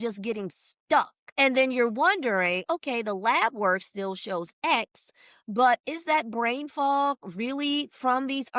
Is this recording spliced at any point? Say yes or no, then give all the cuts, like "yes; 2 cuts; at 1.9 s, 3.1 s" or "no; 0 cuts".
yes; 1 cut; at 1.2 s